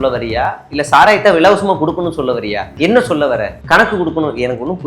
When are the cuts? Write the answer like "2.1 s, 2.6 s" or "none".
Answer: 2.6 s